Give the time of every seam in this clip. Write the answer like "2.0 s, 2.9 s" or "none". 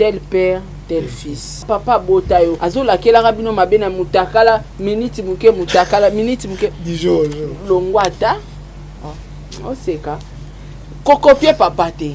1.6 s, 2.6 s